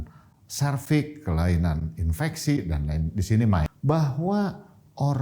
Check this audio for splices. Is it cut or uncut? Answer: cut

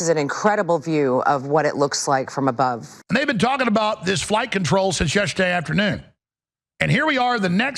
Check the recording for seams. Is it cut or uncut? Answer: cut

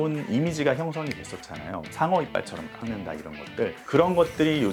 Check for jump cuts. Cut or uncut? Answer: uncut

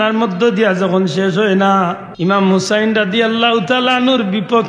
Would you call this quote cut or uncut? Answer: cut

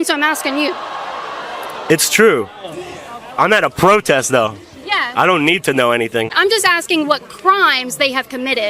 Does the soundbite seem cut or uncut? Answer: cut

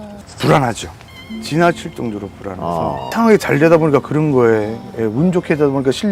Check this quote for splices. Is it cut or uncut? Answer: uncut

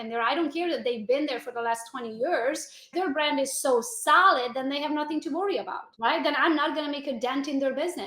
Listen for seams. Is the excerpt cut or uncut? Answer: cut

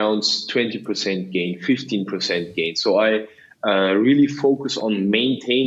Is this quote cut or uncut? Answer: uncut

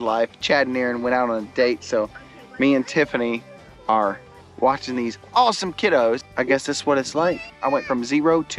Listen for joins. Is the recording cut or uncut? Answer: uncut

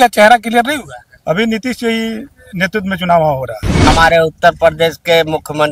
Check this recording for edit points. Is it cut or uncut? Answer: cut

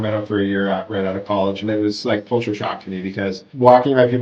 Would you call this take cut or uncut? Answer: uncut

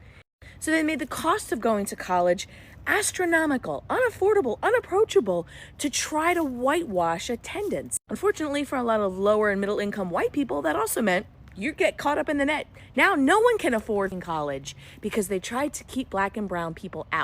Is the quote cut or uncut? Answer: cut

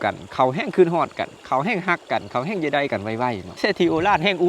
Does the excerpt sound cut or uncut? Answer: cut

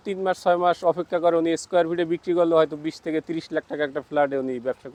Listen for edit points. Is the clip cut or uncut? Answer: uncut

